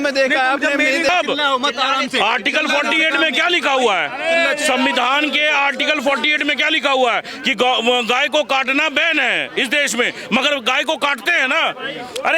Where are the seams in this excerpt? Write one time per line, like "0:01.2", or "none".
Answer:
0:01.1